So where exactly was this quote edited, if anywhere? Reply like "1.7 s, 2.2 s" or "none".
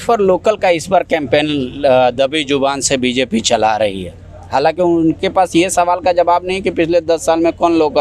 none

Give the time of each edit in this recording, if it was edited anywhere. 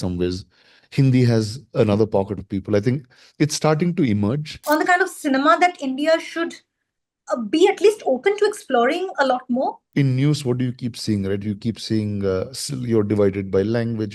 4.5 s, 9.8 s

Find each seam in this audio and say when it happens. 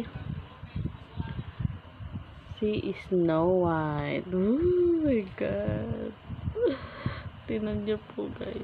none

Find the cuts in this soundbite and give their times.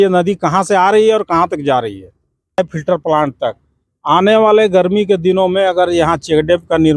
2.6 s

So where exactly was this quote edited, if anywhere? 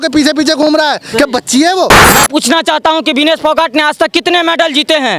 2.1 s

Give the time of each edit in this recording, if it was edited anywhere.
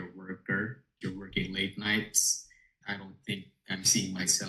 1.0 s, 2.8 s

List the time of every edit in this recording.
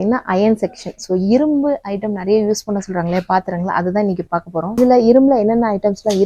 4.8 s

